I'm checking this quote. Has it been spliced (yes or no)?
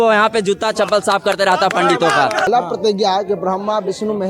yes